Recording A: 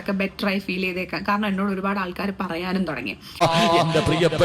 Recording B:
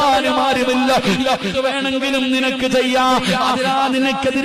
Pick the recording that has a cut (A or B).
A